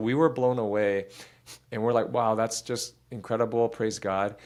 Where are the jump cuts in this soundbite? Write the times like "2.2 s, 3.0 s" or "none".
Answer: none